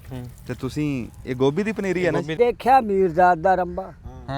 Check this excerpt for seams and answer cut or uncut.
cut